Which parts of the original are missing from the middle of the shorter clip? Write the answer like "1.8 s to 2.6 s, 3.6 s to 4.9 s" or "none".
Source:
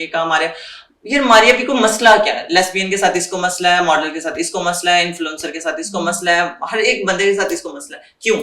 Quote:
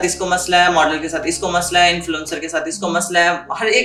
none